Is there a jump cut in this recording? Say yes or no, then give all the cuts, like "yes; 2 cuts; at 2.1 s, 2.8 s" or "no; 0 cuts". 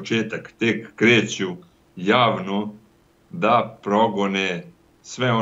no; 0 cuts